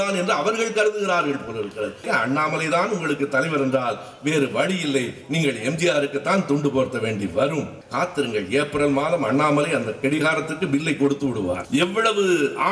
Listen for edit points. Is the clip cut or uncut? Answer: cut